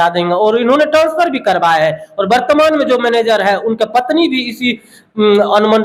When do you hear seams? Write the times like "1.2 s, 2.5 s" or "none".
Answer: none